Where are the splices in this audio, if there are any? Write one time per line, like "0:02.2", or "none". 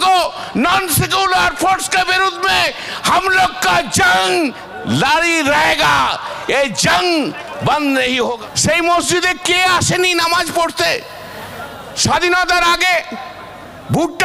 0:08.4